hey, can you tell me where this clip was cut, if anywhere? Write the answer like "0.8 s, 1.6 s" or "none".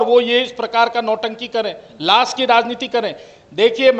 none